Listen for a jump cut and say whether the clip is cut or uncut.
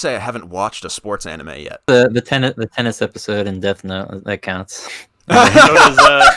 cut